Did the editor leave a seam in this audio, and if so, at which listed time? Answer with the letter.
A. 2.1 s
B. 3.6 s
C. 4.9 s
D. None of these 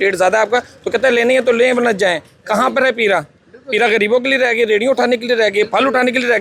D